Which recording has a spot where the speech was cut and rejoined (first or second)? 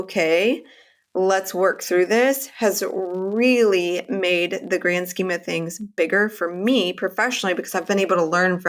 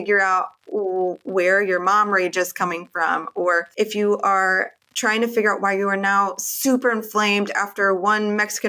second